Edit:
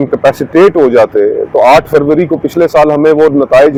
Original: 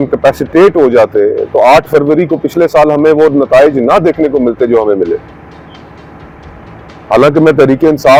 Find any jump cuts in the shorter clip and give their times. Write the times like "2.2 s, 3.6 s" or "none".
none